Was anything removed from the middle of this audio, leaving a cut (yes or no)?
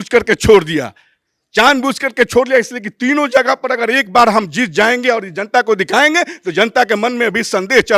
no